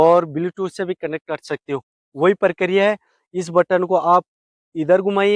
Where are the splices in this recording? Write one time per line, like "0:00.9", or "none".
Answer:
none